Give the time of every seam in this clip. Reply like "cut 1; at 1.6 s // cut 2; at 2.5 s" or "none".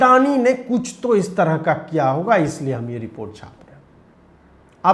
none